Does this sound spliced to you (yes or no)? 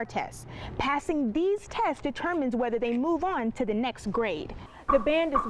yes